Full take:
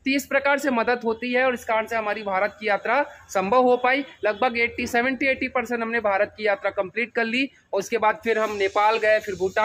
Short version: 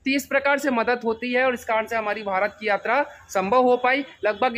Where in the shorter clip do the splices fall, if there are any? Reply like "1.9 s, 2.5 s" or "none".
none